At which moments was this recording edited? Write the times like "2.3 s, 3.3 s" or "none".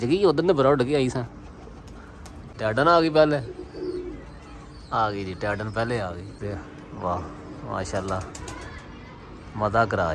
2.5 s, 6.4 s